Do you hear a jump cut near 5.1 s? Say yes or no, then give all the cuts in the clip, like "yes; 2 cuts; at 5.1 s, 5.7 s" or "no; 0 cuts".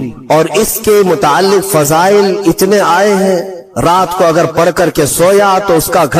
no; 1 cut; at 3.6 s